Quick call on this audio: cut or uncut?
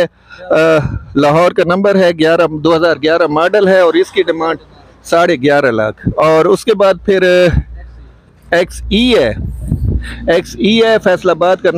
uncut